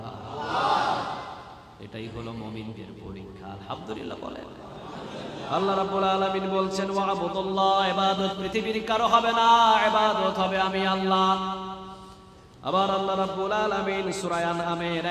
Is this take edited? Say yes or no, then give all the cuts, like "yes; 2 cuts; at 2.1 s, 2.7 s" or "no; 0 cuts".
no; 0 cuts